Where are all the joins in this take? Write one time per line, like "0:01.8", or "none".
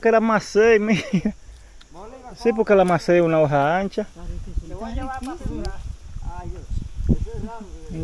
none